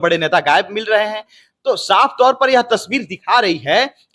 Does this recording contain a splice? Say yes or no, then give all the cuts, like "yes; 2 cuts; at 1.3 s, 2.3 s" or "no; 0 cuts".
no; 0 cuts